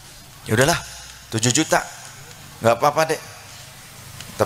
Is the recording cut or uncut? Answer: uncut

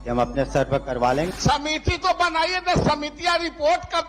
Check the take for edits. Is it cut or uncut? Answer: cut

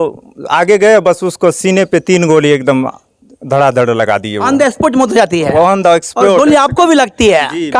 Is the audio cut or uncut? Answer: uncut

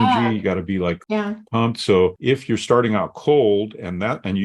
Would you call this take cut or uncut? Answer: cut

